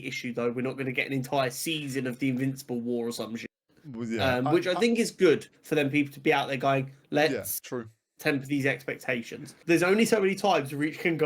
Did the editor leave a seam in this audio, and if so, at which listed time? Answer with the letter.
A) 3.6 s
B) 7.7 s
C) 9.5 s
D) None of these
C